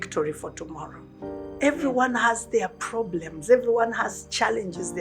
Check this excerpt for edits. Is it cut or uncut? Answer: cut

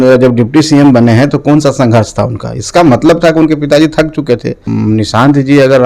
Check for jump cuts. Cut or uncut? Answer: cut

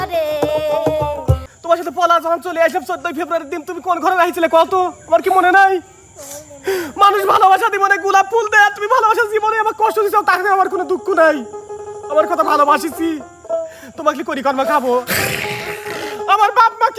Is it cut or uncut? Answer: cut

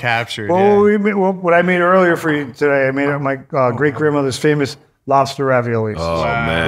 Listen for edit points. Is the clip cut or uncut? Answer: uncut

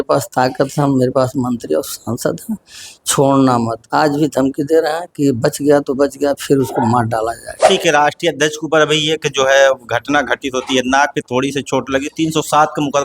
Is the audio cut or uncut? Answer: cut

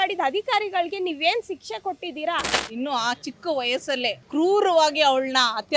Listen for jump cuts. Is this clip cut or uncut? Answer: cut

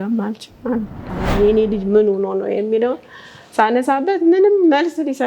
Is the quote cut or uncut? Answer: cut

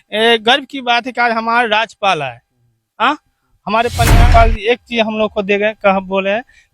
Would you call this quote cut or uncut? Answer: cut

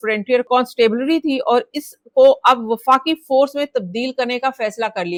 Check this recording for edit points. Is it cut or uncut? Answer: uncut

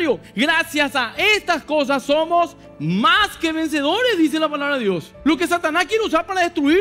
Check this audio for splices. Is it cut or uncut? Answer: cut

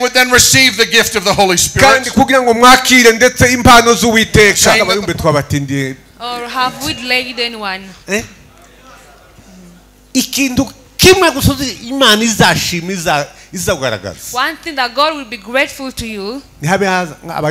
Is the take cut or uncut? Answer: cut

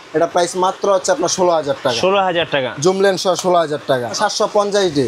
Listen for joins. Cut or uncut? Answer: cut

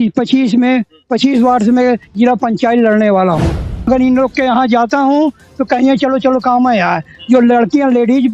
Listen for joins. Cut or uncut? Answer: cut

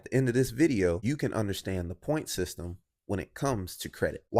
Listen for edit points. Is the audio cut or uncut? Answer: cut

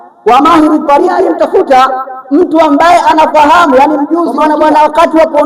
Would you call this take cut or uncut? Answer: cut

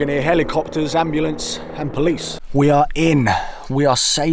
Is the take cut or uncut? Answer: cut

